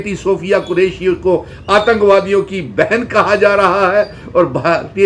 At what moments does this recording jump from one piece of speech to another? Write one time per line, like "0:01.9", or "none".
none